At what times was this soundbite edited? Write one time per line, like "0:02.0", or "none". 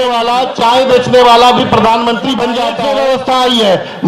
0:02.7